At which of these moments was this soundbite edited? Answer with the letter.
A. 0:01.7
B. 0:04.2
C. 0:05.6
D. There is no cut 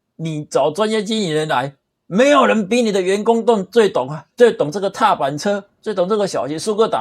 B